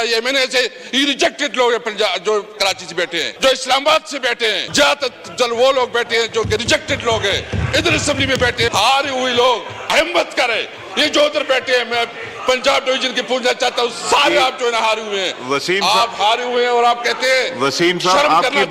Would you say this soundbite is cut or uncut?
cut